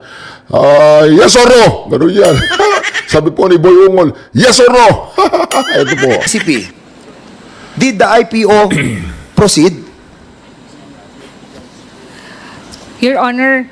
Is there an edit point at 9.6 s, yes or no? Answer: no